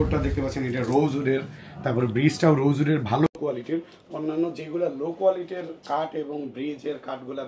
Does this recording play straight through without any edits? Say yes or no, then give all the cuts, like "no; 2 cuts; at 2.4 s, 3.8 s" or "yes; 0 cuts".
yes; 0 cuts